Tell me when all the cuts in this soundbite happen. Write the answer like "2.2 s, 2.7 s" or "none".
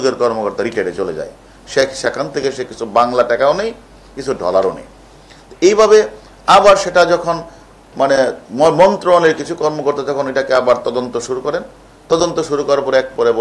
none